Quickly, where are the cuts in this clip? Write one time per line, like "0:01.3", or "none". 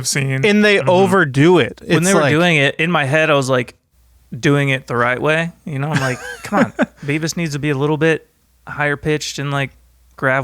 0:02.3